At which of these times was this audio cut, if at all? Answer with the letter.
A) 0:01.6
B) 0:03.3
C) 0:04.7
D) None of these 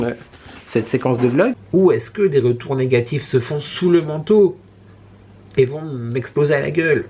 A